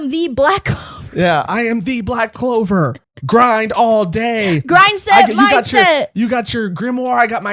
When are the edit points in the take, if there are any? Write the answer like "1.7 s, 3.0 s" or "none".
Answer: 3.1 s